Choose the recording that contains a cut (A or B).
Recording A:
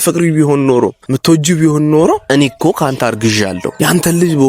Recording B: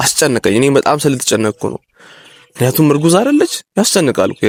A